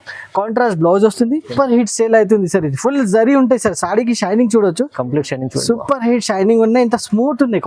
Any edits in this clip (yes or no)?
yes